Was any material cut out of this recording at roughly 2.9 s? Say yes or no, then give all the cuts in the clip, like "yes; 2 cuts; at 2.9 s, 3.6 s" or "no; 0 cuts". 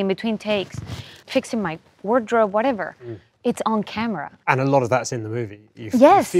no; 2 cuts; at 1.2 s, 4.4 s